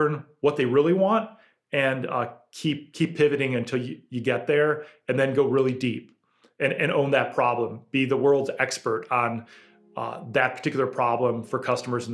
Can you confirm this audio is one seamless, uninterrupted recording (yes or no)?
yes